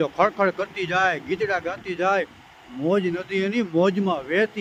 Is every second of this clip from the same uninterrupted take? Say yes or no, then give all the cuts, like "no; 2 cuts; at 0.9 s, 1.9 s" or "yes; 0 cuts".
yes; 0 cuts